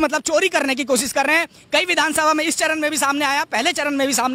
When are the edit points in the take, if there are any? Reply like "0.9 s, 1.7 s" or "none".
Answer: none